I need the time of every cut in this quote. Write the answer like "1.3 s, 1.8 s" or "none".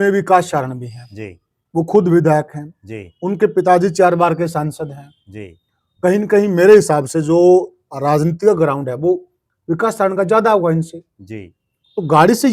none